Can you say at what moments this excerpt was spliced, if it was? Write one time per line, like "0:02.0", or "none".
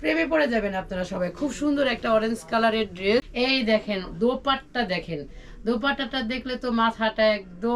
0:03.3